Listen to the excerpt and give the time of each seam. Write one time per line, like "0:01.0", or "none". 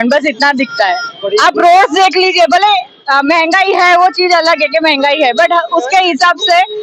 none